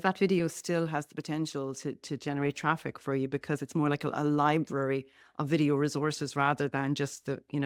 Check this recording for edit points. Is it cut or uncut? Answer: uncut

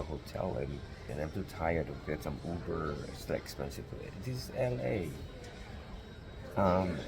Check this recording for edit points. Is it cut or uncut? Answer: cut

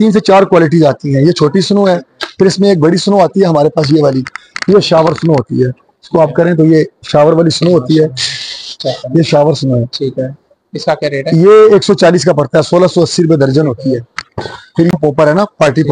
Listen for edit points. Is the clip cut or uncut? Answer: cut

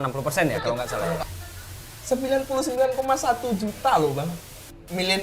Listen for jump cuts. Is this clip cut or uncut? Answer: cut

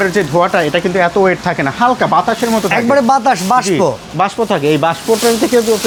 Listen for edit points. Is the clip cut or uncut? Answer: uncut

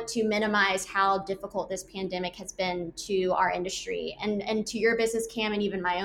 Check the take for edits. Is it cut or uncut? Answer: uncut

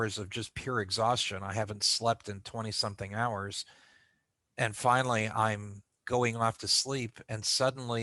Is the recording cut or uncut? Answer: uncut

